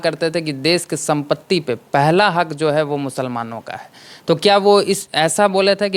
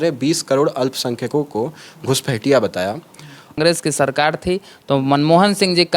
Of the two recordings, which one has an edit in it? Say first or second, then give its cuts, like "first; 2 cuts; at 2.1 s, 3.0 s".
second; 1 cut; at 3.6 s